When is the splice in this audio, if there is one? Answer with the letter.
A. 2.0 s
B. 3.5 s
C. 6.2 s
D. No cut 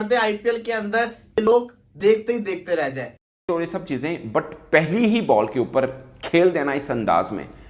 B